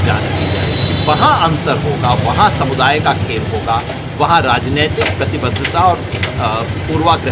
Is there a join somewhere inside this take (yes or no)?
no